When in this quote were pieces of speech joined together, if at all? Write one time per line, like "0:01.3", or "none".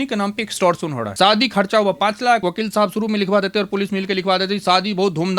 0:01.0
0:02.4